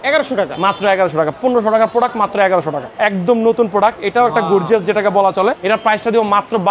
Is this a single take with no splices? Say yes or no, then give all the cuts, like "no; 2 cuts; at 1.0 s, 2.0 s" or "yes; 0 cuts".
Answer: no; 2 cuts; at 2.9 s, 5.6 s